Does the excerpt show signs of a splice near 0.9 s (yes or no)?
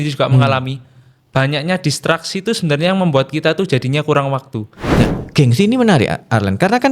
no